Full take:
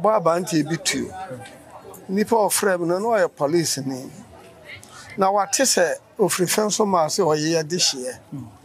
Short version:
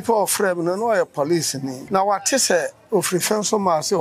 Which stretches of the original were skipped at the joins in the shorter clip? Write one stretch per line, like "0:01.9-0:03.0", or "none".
0:04.0-0:05.1